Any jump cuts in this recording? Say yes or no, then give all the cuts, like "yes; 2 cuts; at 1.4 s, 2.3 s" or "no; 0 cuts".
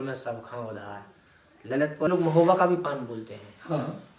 yes; 1 cut; at 2.1 s